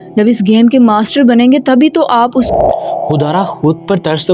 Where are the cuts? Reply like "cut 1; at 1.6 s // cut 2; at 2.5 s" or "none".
cut 1; at 2.5 s